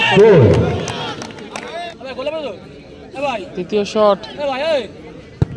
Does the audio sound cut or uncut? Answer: cut